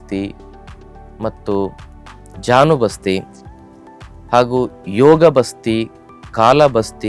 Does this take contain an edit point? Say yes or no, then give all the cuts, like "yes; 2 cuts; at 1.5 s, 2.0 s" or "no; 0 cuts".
no; 0 cuts